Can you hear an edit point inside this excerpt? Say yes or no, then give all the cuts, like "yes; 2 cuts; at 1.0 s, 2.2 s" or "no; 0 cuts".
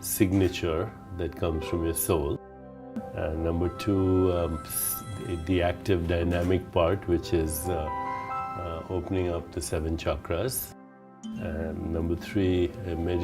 yes; 1 cut; at 11.2 s